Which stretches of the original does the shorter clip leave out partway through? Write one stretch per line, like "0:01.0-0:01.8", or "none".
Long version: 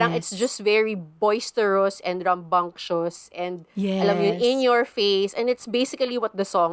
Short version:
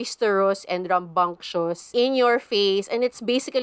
0:03.3-0:04.4